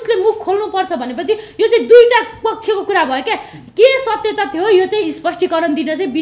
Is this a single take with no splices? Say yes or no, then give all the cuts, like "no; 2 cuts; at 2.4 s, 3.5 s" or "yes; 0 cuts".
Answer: yes; 0 cuts